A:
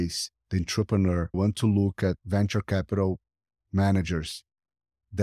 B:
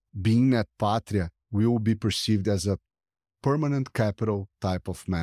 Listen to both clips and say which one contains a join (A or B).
A